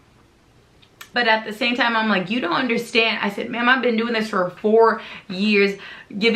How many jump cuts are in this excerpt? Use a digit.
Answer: 1